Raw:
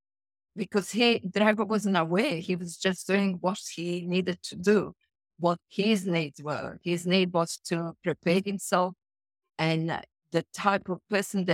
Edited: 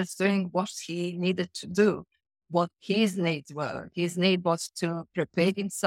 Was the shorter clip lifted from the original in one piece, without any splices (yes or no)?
yes